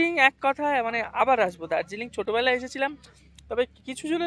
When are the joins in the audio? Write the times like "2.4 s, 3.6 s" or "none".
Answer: none